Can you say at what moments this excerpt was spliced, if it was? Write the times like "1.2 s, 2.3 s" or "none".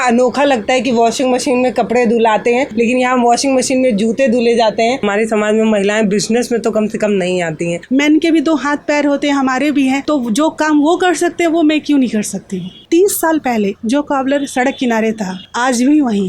5.0 s, 7.8 s, 12.8 s